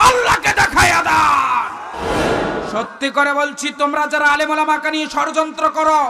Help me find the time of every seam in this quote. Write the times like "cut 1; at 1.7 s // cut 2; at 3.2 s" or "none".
cut 1; at 2.4 s